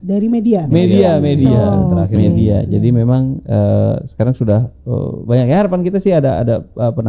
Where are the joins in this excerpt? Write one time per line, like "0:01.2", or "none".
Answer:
none